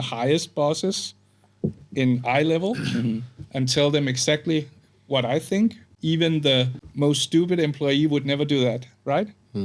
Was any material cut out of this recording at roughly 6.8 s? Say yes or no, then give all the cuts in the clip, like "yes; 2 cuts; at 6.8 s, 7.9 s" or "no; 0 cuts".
yes; 2 cuts; at 5.9 s, 6.8 s